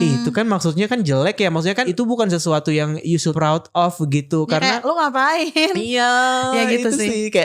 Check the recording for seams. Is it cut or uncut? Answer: cut